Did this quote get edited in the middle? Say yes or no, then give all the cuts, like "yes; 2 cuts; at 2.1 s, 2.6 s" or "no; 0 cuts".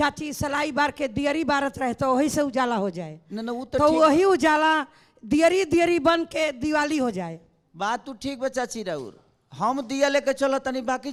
no; 0 cuts